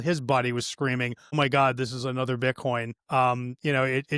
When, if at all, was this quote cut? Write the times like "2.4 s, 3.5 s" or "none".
1.3 s, 3.0 s